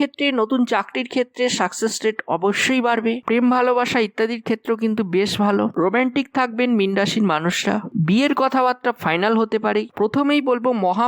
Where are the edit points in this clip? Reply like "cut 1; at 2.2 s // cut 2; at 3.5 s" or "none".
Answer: cut 1; at 3.2 s // cut 2; at 9.9 s